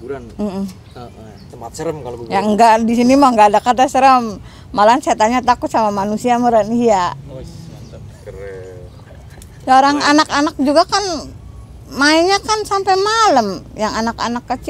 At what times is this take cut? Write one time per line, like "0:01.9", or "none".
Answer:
none